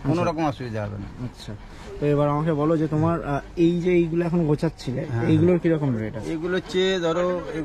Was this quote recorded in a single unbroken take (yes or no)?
yes